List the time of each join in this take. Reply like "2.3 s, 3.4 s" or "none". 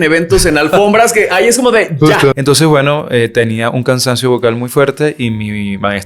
2.4 s